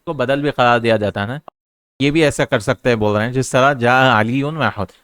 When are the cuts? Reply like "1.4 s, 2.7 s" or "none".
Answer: 1.3 s